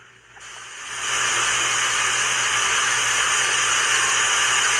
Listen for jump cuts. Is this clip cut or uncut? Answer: cut